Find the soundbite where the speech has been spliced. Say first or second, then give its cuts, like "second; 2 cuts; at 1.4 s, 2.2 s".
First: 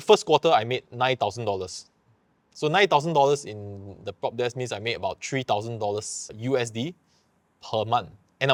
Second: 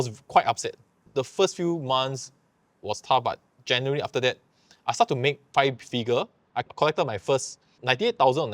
second; 3 cuts; at 1.1 s, 6.6 s, 7.7 s